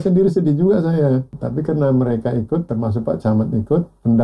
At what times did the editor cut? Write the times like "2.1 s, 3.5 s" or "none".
1.4 s, 2.7 s